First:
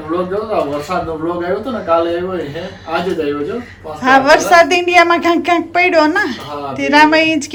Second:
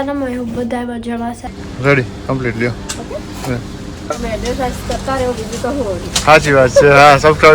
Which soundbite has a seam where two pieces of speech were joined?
second; 2 cuts; at 1.4 s, 4.2 s

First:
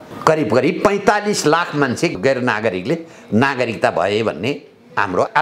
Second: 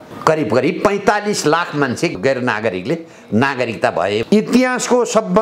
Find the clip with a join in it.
second; 1 cut; at 4.2 s

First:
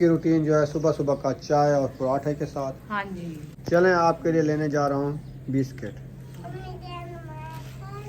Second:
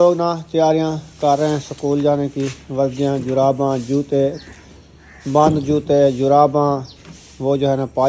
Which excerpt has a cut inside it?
first; 1 cut; at 3.4 s

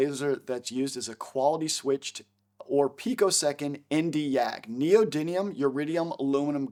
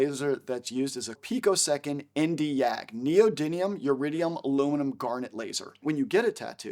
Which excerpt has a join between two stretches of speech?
second; 2 cuts; at 1.2 s, 5.8 s

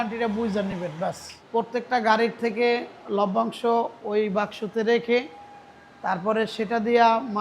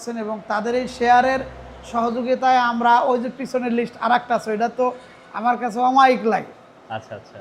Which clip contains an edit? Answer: first; 1 cut; at 1.3 s

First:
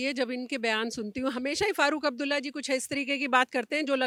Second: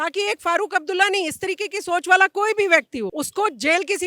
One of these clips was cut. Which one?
second; 1 cut; at 3.1 s

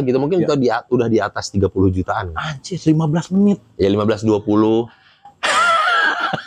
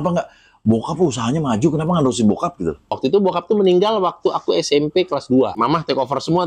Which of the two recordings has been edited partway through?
second; 2 cuts; at 2.9 s, 5.5 s

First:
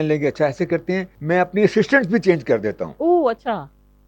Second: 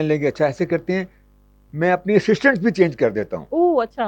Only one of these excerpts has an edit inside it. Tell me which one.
first; 1 cut; at 1.1 s

